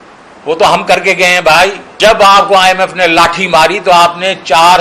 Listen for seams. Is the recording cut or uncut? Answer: cut